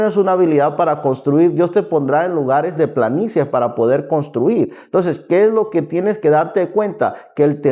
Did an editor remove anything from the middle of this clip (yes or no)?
no